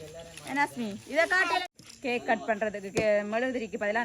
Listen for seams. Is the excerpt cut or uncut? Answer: cut